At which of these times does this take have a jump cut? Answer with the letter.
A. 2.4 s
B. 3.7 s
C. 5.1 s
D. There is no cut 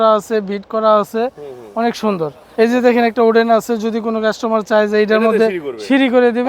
A